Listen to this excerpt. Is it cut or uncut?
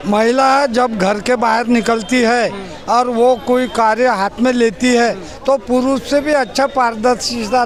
uncut